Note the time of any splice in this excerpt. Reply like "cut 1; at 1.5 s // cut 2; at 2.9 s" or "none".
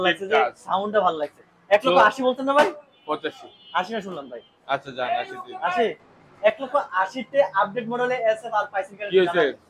none